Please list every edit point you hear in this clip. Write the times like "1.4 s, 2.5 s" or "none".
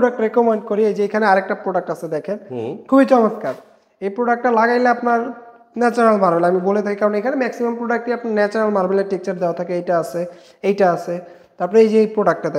none